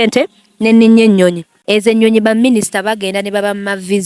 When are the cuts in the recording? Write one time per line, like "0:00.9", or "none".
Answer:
0:01.5